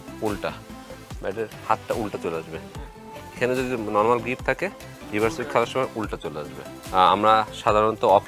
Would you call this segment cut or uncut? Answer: cut